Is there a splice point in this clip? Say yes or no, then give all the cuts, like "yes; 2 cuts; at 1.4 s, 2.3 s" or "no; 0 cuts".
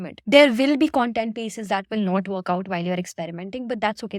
no; 0 cuts